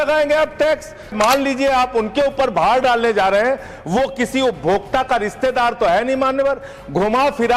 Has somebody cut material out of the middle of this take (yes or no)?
yes